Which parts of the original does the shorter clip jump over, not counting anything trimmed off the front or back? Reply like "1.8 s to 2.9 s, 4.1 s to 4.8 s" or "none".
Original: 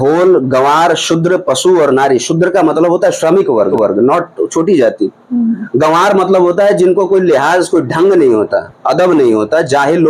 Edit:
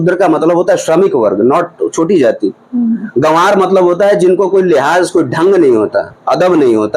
3.6 s to 3.8 s